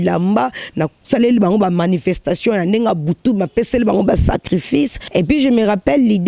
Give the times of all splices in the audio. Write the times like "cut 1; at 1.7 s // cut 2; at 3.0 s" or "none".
cut 1; at 5.0 s